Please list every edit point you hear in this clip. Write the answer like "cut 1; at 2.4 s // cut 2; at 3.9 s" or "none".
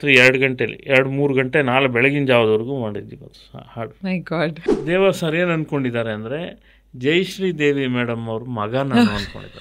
cut 1; at 4.6 s